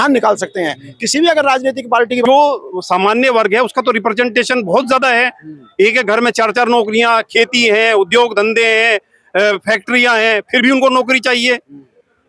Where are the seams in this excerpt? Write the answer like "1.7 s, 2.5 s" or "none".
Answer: 2.2 s